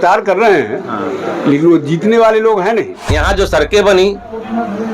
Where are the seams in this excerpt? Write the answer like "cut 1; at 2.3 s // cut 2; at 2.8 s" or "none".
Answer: cut 1; at 3.0 s